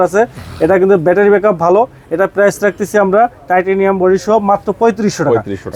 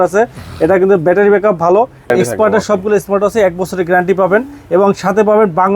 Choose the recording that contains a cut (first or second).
second